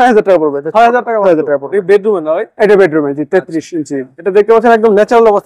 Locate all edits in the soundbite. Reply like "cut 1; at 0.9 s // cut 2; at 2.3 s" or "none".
none